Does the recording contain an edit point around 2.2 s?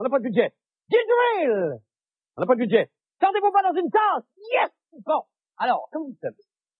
no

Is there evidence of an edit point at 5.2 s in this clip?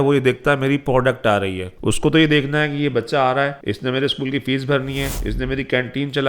yes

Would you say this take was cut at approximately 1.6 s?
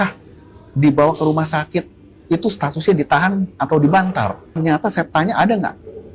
no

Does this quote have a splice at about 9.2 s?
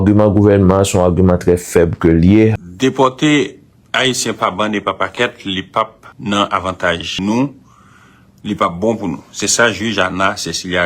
no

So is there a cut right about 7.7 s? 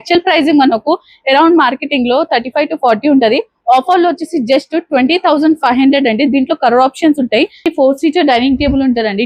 yes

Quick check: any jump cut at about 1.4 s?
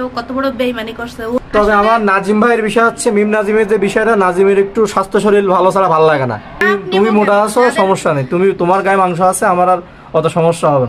yes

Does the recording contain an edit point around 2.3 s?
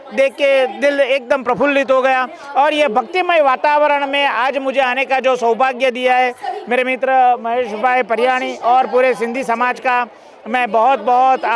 no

